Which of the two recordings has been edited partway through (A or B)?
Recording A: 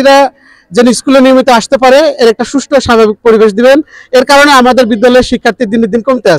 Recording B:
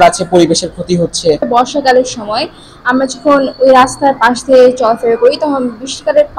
B